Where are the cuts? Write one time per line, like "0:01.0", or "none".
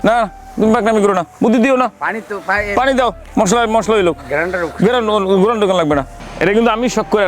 0:01.3
0:03.2
0:06.2